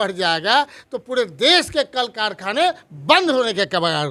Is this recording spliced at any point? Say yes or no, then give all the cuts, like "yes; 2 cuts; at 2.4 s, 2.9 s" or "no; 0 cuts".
no; 0 cuts